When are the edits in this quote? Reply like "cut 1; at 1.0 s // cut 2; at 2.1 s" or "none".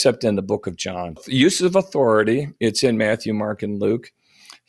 cut 1; at 1.2 s